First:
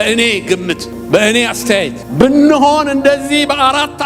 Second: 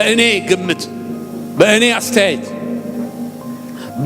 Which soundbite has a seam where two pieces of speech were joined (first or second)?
first